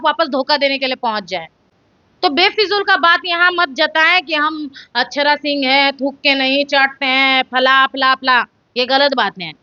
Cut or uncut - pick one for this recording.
uncut